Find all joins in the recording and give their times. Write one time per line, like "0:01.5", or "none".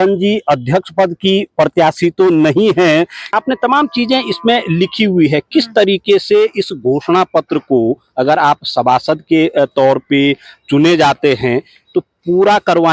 0:03.3